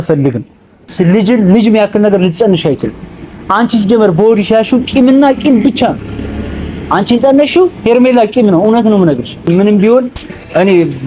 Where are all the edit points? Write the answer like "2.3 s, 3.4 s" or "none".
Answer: 0.9 s, 9.5 s